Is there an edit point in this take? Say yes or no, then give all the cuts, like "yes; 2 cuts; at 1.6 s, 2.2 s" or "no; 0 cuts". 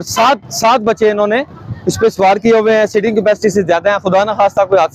no; 0 cuts